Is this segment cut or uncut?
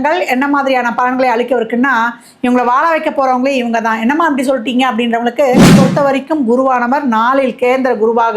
cut